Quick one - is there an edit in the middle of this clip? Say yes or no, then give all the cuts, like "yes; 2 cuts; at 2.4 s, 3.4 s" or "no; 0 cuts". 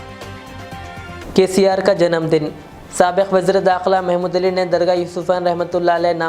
yes; 1 cut; at 1.2 s